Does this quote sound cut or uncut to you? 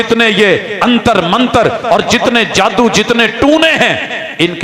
uncut